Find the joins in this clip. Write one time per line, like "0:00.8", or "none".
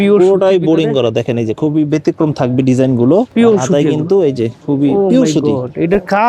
0:03.3
0:04.5